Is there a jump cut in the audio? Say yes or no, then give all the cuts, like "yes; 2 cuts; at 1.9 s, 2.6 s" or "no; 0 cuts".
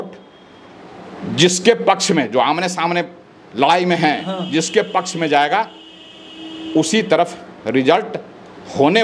no; 0 cuts